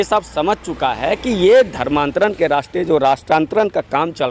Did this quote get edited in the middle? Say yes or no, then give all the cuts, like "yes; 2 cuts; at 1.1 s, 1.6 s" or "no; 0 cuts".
no; 0 cuts